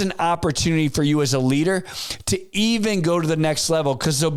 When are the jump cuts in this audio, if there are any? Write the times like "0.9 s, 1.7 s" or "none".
none